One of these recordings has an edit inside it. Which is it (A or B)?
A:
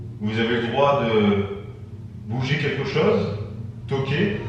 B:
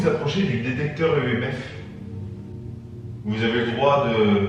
B